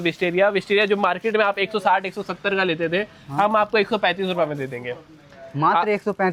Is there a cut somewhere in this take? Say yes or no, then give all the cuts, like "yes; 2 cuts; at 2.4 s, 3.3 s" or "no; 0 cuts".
no; 0 cuts